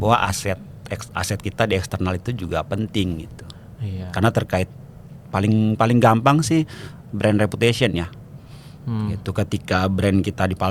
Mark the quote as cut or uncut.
uncut